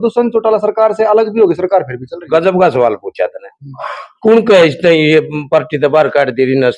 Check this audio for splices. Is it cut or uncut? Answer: uncut